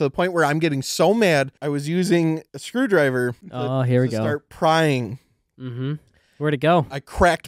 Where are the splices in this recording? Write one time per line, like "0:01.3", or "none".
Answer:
0:01.6
0:02.5
0:03.5